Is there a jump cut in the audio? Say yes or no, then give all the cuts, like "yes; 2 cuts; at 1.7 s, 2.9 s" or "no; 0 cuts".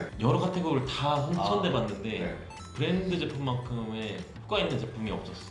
no; 0 cuts